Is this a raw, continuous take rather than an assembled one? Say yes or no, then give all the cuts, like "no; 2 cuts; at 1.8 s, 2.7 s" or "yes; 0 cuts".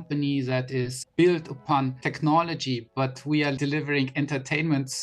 no; 3 cuts; at 1.0 s, 2.0 s, 3.6 s